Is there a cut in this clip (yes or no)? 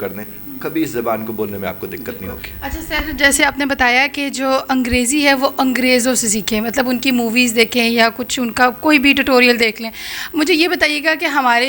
no